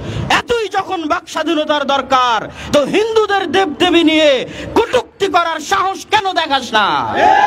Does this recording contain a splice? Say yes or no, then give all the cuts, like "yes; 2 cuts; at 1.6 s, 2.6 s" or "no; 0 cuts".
no; 0 cuts